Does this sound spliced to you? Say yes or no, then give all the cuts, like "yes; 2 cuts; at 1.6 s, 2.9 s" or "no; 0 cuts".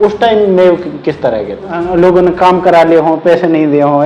yes; 1 cut; at 1.8 s